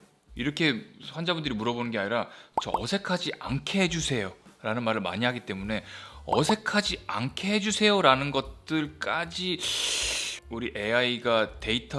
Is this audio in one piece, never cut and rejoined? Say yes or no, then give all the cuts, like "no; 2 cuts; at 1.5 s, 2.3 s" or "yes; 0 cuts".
yes; 0 cuts